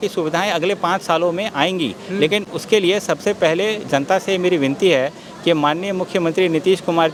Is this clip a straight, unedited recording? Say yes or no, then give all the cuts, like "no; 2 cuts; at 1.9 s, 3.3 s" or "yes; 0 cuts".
yes; 0 cuts